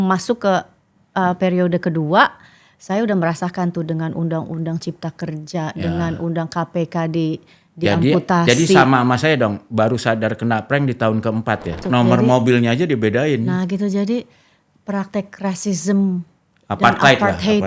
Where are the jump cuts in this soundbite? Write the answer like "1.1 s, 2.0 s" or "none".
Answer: 11.8 s